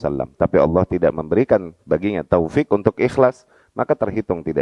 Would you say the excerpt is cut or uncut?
uncut